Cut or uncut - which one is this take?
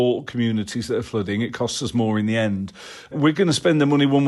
cut